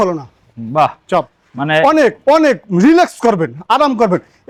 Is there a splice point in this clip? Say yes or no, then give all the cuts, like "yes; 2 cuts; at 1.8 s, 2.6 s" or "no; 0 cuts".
no; 0 cuts